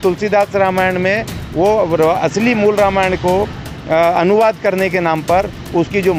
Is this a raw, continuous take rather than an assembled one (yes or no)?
yes